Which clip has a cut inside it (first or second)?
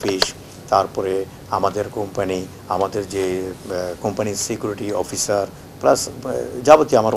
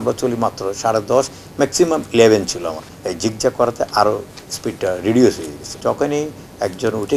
second